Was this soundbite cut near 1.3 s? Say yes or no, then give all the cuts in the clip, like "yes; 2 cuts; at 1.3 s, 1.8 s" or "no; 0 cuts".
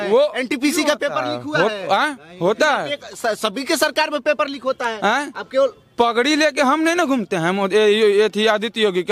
no; 0 cuts